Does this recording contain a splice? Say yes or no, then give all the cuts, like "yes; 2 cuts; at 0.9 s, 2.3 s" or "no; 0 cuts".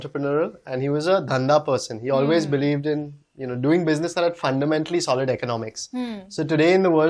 no; 0 cuts